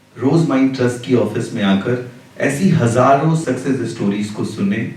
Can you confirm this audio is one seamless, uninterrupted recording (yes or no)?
yes